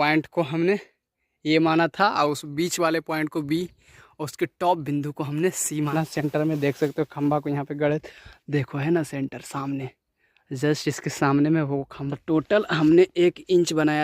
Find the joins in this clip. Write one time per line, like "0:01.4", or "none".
0:05.9
0:12.0